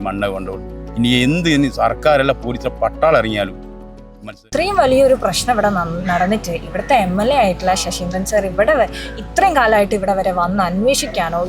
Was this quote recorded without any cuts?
no; 1 cut; at 4.4 s

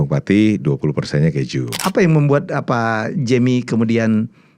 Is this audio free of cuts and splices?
no; 1 cut; at 1.8 s

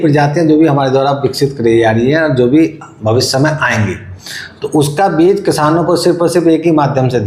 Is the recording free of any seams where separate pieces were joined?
yes; 0 cuts

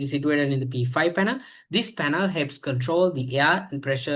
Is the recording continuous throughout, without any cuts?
yes; 0 cuts

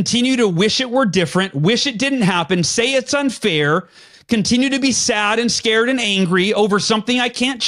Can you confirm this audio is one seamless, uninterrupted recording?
yes; 0 cuts

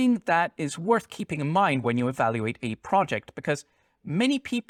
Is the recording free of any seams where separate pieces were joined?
yes; 0 cuts

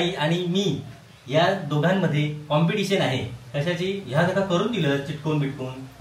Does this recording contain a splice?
no; 0 cuts

